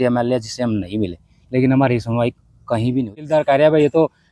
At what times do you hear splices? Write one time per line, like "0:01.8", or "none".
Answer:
0:03.2